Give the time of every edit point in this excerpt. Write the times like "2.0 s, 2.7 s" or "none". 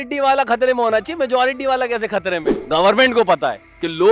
2.5 s

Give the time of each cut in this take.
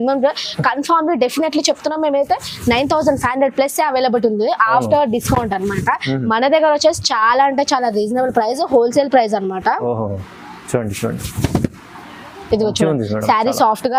none

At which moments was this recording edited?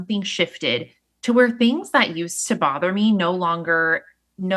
none

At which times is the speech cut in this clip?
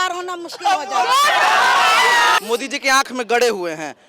2.4 s

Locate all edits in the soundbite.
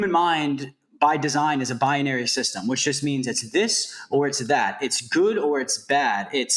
none

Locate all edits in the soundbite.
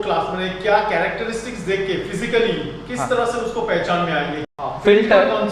4.4 s

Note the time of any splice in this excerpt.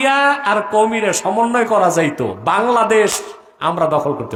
none

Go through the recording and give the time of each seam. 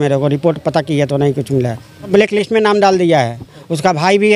2.1 s

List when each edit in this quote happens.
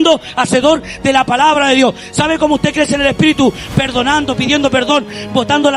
none

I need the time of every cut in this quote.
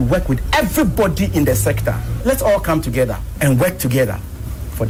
none

